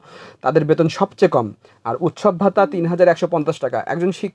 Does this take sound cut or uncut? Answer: uncut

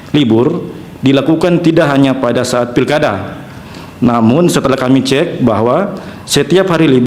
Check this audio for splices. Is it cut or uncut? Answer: uncut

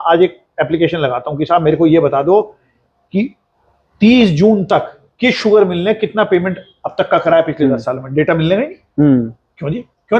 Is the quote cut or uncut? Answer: uncut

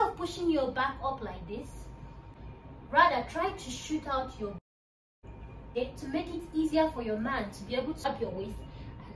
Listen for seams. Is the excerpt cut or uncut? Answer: cut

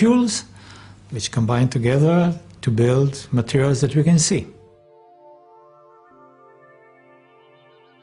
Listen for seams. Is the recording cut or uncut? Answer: uncut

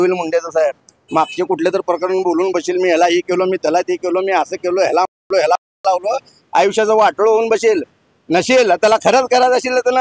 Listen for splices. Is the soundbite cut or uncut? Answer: uncut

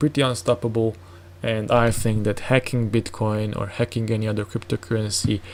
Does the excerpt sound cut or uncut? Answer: uncut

